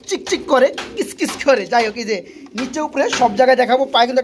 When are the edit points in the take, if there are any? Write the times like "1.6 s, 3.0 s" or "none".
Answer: none